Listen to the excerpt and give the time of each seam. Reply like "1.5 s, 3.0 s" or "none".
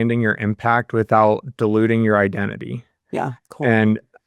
none